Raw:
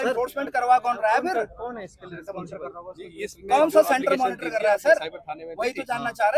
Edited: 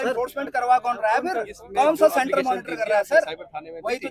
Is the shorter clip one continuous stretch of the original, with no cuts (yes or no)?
no